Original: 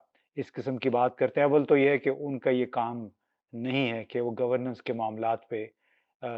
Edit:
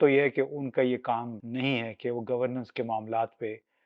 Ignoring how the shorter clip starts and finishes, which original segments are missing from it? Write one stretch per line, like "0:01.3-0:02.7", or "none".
0:03.1-0:03.5

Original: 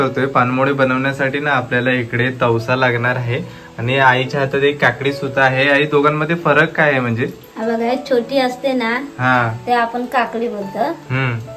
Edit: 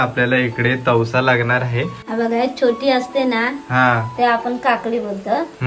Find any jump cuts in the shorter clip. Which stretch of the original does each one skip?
0:03.5-0:07.5

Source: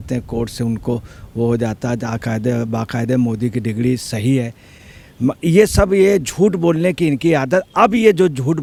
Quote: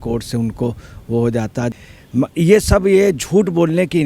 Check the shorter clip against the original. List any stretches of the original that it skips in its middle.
0:02.0-0:04.8

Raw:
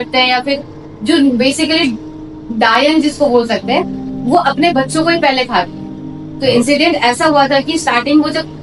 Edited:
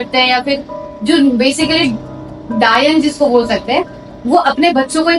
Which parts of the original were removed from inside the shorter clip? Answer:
none

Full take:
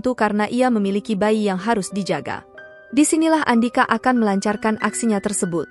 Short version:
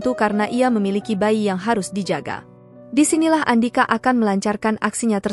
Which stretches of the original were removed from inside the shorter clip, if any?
none

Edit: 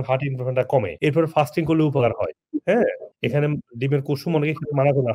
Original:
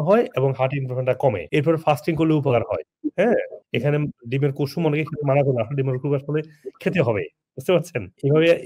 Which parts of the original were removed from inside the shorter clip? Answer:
none

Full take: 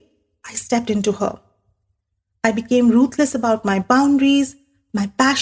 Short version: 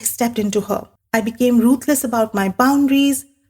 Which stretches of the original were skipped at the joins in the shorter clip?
0:01.5-0:02.2

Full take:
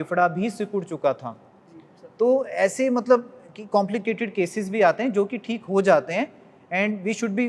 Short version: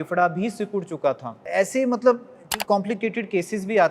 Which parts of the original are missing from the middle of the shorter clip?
0:01.4-0:02.5

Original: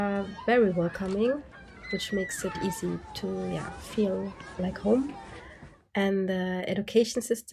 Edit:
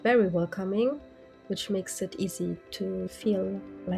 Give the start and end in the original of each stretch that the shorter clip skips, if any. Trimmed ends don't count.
0:03.5-0:03.8

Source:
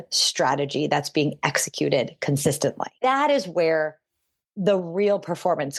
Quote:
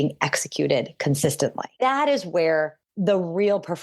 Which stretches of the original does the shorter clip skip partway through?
0:04.0-0:04.4

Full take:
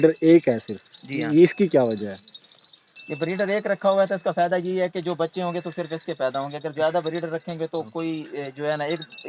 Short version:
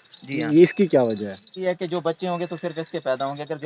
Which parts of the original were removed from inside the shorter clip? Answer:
0:02.4-0:04.7

